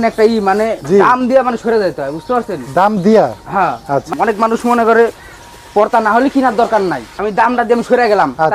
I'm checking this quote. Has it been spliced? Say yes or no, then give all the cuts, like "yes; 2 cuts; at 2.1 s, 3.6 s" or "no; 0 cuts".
yes; 2 cuts; at 4.1 s, 7.1 s